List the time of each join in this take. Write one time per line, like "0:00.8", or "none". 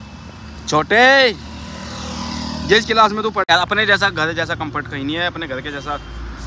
0:03.5